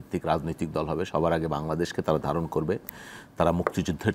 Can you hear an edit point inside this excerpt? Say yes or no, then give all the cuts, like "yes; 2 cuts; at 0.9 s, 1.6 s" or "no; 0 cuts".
no; 0 cuts